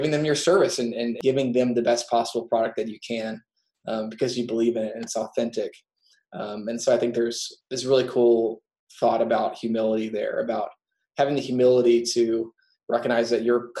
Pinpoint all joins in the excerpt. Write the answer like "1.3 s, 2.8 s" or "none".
1.1 s, 7.5 s